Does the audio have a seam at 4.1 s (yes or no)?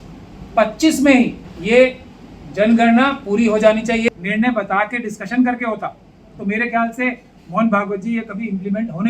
yes